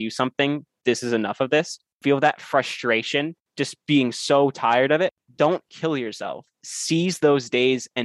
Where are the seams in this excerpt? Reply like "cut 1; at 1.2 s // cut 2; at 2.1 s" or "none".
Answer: cut 1; at 2.0 s // cut 2; at 3.5 s // cut 3; at 5.2 s

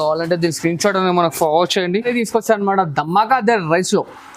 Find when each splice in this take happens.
cut 1; at 2.1 s

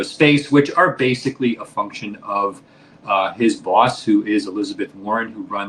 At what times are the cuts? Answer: none

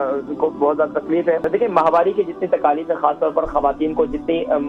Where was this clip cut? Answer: cut 1; at 1.5 s

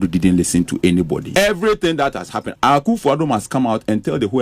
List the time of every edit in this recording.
cut 1; at 1.2 s // cut 2; at 2.4 s

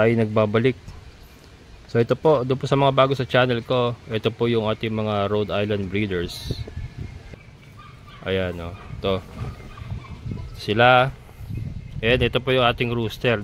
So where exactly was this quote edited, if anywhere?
cut 1; at 7.3 s

